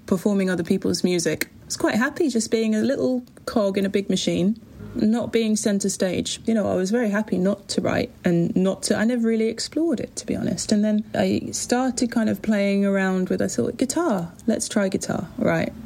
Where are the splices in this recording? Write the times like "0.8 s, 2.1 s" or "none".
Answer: 1.5 s, 4.8 s, 6.4 s, 11.1 s